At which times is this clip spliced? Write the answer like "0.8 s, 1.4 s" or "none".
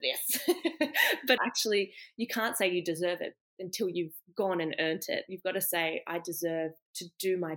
1.4 s